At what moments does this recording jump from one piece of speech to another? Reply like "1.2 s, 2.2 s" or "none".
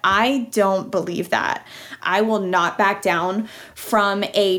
1.9 s